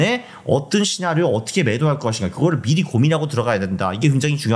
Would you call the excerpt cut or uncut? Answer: uncut